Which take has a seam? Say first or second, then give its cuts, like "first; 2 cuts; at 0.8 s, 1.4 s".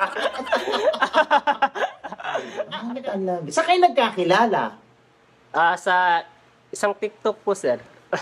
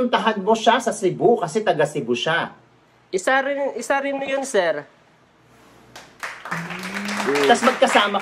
first; 1 cut; at 2.7 s